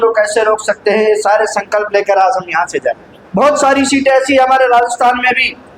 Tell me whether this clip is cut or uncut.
cut